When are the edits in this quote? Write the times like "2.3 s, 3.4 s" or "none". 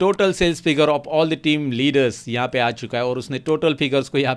none